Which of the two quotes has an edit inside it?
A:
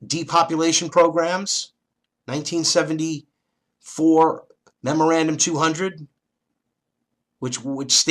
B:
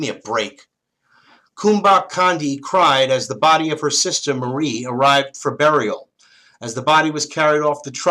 B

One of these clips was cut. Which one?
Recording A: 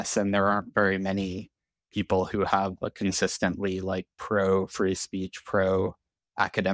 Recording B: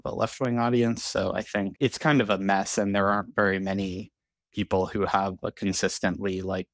B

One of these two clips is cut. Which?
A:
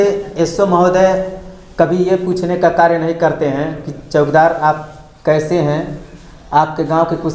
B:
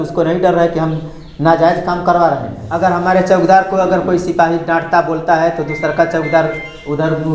B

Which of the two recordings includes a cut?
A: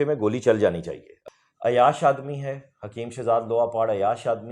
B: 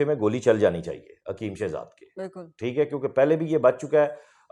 A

